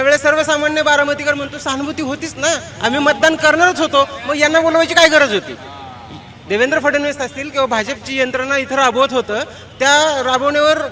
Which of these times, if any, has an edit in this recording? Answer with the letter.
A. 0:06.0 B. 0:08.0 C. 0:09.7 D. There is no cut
D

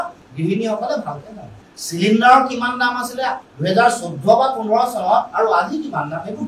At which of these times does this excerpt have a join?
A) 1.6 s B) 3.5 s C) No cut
C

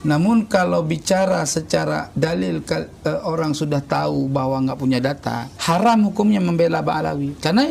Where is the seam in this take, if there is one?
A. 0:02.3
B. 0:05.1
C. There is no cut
C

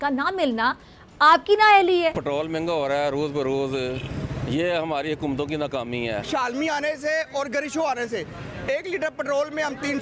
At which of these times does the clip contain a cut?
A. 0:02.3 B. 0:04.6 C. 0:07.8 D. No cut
A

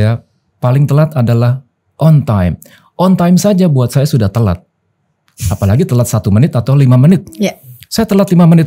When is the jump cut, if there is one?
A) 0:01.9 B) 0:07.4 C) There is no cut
C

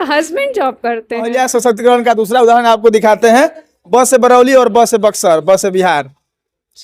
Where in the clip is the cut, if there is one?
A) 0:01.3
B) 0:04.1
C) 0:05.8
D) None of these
A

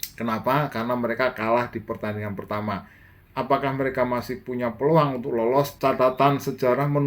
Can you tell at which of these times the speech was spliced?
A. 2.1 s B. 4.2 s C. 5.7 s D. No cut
C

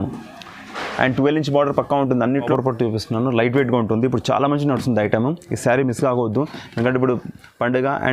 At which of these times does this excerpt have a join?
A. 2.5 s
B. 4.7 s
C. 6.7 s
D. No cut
A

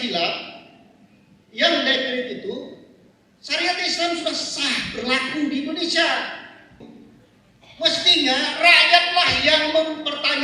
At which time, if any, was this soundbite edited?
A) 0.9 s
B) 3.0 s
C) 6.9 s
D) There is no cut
C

